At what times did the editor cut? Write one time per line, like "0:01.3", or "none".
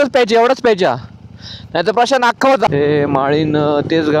0:02.7